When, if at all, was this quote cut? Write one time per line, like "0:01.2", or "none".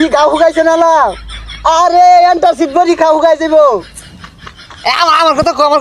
none